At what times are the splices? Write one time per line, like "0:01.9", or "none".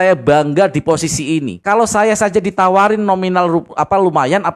0:01.5